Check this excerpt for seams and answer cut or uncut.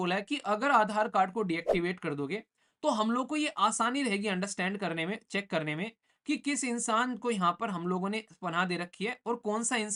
uncut